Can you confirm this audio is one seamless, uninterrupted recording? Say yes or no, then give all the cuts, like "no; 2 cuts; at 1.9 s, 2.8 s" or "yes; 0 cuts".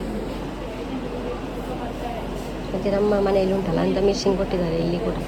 yes; 0 cuts